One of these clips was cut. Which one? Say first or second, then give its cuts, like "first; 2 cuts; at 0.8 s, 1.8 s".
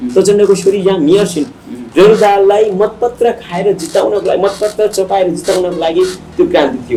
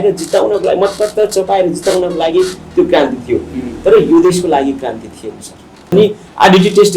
second; 1 cut; at 5.9 s